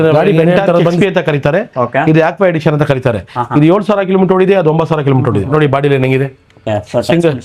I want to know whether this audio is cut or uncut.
cut